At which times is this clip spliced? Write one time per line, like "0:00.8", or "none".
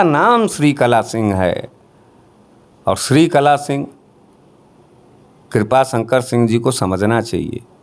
none